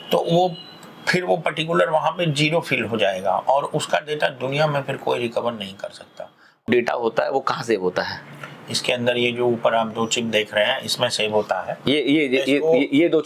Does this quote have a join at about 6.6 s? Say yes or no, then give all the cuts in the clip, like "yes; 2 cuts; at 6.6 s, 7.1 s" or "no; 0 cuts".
yes; 1 cut; at 6.6 s